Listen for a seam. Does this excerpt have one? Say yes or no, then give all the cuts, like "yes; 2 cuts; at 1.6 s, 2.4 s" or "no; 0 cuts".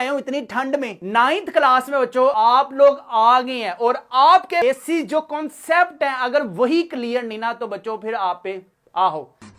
yes; 3 cuts; at 1.0 s, 2.3 s, 4.6 s